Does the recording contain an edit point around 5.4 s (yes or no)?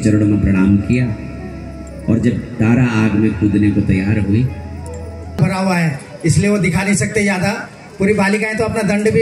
yes